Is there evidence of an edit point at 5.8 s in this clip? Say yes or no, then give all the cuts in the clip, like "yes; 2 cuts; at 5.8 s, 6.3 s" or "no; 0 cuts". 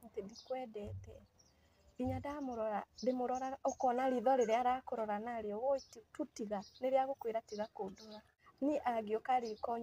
no; 1 cut; at 8.7 s